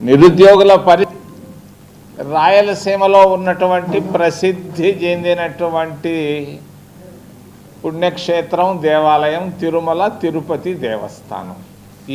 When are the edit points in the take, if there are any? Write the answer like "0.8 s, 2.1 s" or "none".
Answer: 1.1 s